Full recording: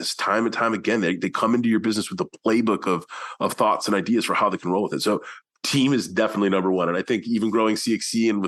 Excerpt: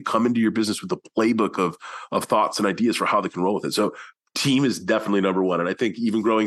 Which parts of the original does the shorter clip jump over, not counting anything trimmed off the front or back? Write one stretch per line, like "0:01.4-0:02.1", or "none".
none